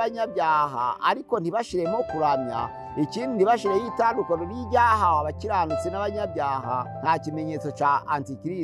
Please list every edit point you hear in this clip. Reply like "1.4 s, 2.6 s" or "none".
6.9 s